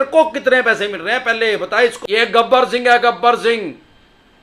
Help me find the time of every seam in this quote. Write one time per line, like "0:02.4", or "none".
0:02.0